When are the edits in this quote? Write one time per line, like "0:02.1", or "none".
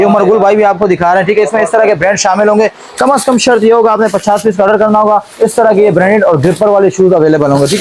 0:02.9